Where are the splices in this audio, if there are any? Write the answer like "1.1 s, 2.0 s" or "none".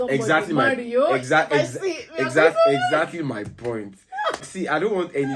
4.4 s